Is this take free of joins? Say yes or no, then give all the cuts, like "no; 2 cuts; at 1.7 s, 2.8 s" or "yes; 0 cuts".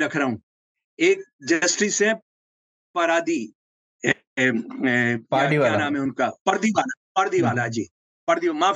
yes; 0 cuts